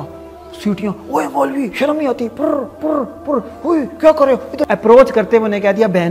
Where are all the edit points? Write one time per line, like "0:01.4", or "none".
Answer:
0:04.7